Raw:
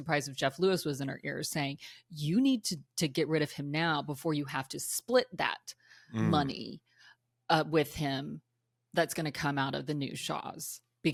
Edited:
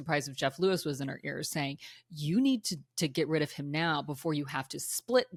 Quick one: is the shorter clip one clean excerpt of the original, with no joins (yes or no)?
yes